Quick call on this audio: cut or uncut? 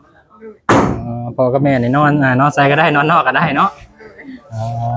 uncut